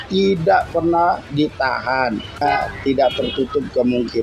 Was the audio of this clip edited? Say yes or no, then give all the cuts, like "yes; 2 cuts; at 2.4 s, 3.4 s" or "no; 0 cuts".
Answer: yes; 1 cut; at 2.4 s